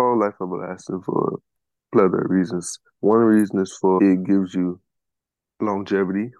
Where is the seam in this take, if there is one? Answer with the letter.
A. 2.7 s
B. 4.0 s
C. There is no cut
B